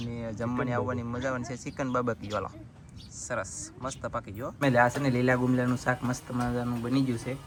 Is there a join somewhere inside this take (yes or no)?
no